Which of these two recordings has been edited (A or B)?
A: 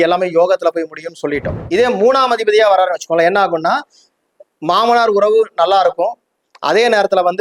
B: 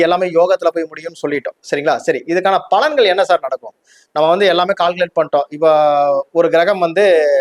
A